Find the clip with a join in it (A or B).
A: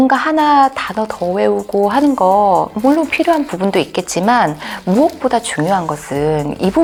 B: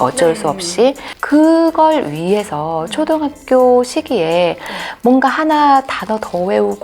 B